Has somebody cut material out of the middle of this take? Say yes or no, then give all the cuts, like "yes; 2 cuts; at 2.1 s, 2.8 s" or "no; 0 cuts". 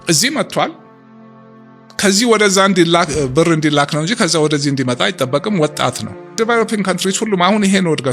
yes; 1 cut; at 6.3 s